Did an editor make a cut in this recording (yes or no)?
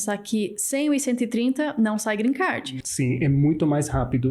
yes